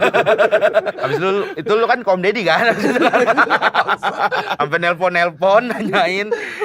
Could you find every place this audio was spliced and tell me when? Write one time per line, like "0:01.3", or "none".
0:00.9
0:04.5